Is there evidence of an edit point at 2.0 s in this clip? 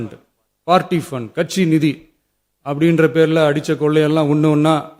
no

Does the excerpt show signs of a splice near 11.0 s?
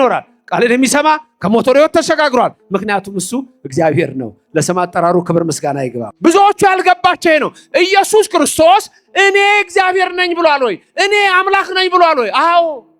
no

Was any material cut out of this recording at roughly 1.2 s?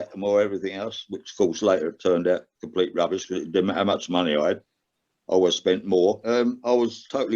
no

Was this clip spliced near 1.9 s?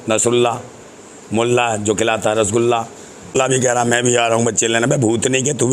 no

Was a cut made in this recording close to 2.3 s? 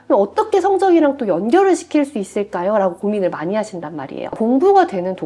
no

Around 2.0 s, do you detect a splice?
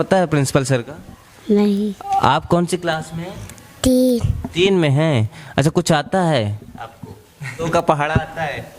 yes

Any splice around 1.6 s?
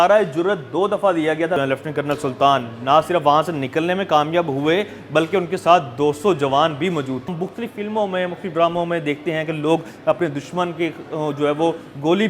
yes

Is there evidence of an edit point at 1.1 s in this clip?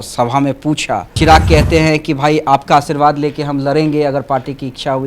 yes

